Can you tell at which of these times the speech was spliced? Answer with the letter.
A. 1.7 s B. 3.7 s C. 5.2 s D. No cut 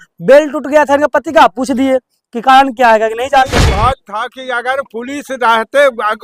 B